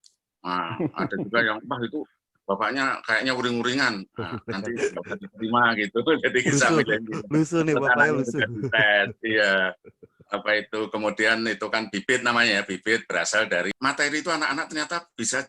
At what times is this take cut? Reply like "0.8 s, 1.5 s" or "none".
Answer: 13.7 s

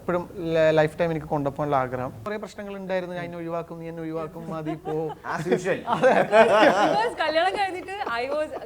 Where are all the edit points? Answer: 2.2 s

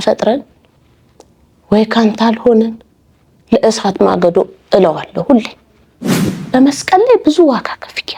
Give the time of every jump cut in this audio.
6.2 s

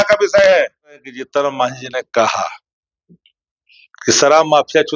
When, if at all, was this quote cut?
1.2 s

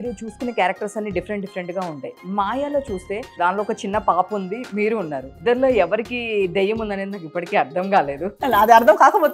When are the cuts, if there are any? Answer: 3.3 s, 5.4 s, 8.4 s

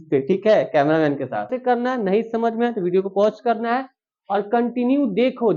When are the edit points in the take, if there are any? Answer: 1.5 s

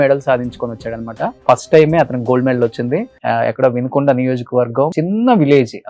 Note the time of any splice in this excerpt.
1.4 s, 3.1 s, 4.9 s

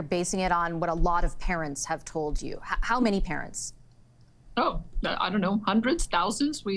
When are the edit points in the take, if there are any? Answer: none

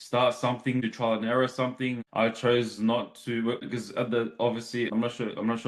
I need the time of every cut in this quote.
0.9 s, 2.0 s, 3.6 s, 4.9 s

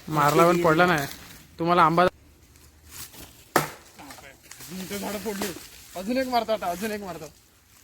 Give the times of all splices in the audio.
2.1 s

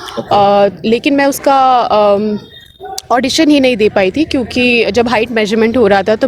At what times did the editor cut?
none

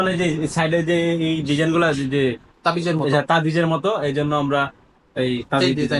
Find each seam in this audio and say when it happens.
none

